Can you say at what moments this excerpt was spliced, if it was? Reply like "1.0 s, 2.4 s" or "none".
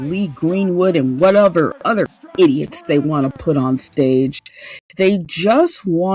none